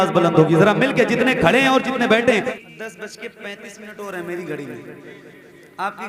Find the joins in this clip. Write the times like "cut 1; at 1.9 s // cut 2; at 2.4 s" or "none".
cut 1; at 2.5 s